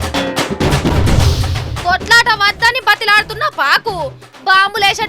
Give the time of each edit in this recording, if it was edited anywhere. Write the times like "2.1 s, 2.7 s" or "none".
1.7 s